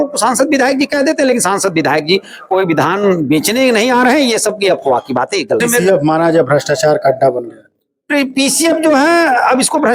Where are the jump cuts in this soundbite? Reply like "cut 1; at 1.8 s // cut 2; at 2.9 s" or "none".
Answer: cut 1; at 5.6 s